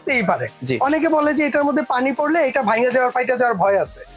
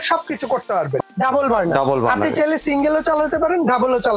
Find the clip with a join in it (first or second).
second